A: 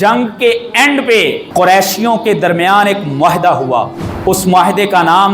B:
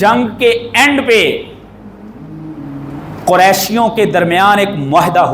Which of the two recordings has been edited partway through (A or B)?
A